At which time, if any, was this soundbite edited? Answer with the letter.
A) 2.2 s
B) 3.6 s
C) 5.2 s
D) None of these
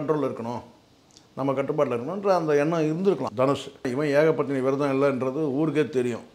B